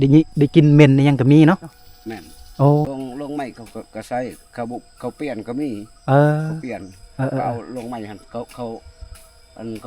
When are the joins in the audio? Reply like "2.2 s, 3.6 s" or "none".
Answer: 1.9 s, 2.9 s